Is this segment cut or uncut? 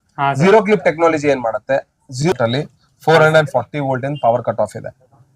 cut